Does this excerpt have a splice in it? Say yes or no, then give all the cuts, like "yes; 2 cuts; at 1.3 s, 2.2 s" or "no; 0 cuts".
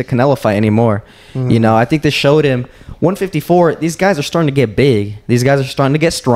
no; 0 cuts